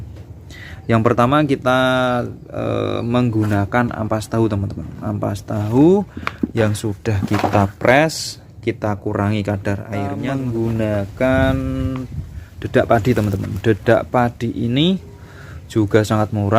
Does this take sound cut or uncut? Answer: cut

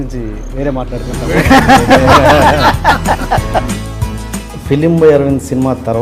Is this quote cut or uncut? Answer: cut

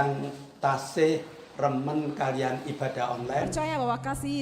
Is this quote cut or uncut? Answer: cut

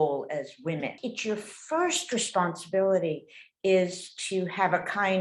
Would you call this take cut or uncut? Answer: cut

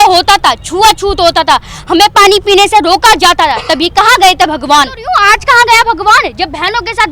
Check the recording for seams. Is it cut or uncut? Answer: cut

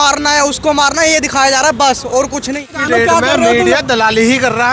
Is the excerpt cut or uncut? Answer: cut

